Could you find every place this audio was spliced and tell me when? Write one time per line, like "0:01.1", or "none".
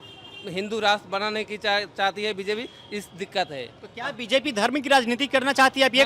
none

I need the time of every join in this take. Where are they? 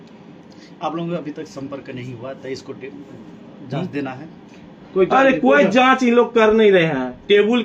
none

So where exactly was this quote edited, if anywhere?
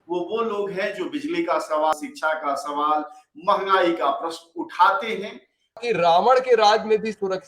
0:01.9
0:05.8

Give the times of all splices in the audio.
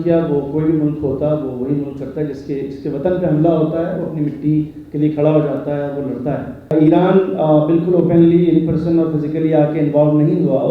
0:06.7

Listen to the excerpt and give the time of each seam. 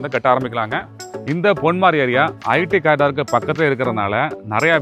0:01.1

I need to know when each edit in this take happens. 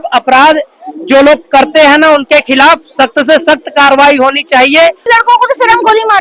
0:05.0

